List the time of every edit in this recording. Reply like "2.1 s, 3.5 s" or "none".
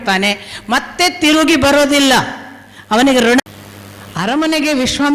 3.4 s